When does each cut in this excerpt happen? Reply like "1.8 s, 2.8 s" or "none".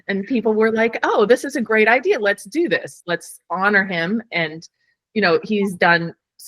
none